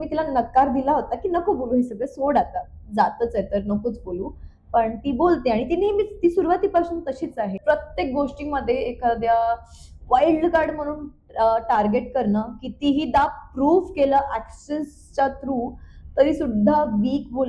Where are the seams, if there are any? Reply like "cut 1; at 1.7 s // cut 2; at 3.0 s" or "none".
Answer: cut 1; at 7.6 s